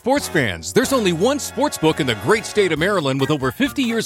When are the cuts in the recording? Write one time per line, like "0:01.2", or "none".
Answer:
none